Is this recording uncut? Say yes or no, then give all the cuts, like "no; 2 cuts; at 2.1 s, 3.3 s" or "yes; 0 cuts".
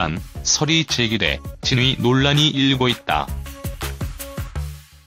yes; 0 cuts